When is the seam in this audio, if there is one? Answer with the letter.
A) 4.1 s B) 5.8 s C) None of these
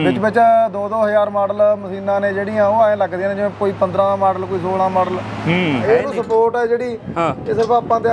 B